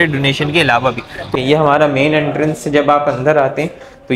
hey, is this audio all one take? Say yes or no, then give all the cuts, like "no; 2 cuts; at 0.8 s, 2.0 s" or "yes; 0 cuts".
no; 1 cut; at 1.3 s